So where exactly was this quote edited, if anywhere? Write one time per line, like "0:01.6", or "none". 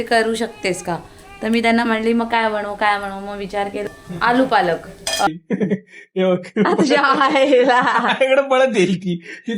0:03.9
0:05.3